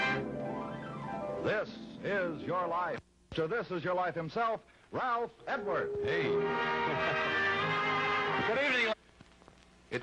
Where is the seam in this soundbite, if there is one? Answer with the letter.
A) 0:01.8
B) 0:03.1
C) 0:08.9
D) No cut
D